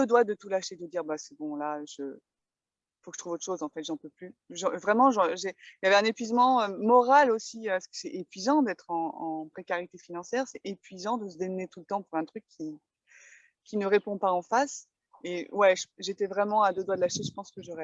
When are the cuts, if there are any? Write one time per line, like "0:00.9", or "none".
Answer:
none